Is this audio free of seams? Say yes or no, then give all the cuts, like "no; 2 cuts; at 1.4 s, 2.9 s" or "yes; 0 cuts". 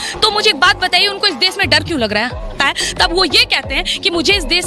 no; 1 cut; at 2.5 s